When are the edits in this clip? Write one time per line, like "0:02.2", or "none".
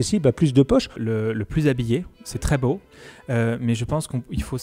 0:01.0